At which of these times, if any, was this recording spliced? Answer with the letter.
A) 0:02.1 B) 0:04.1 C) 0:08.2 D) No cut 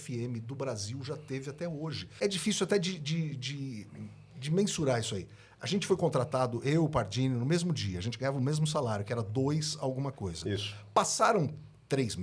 A